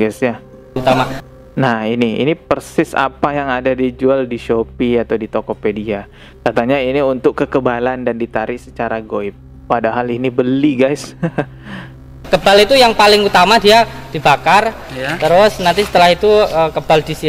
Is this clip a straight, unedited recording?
yes; 0 cuts

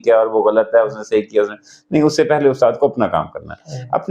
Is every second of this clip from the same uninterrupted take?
yes; 0 cuts

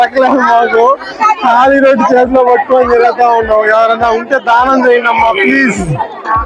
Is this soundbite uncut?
yes; 0 cuts

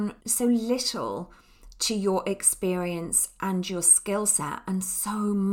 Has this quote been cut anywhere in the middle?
no; 0 cuts

